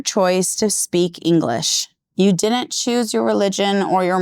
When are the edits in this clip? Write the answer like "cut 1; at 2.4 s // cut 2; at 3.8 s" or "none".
none